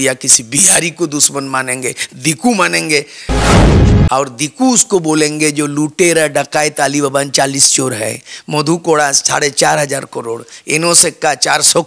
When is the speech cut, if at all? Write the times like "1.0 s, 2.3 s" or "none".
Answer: 3.2 s, 4.1 s